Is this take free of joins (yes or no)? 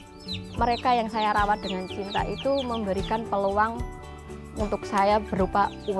yes